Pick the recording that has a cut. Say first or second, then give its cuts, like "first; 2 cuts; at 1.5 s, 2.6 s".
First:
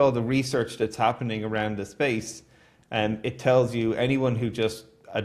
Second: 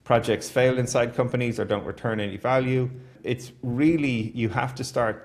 second; 1 cut; at 3.2 s